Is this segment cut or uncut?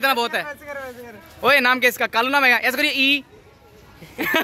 uncut